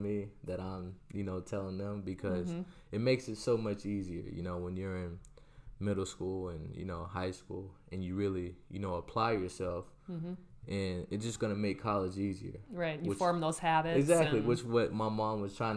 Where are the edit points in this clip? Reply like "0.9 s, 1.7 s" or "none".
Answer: none